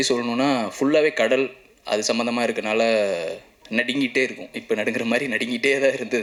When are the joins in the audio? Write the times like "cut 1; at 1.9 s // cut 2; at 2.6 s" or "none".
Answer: none